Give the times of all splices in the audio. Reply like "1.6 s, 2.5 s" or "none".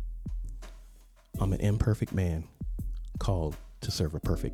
1.1 s